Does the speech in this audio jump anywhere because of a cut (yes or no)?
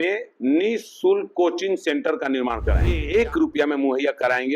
yes